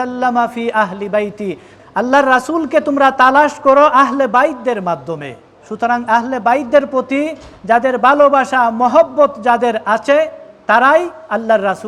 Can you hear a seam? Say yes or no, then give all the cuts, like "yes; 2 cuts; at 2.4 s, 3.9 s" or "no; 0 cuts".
no; 0 cuts